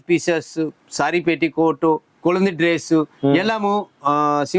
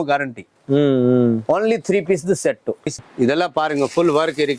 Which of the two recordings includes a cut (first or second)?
second